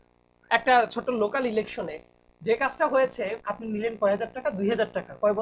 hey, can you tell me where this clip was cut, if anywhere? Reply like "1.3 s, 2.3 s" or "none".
3.4 s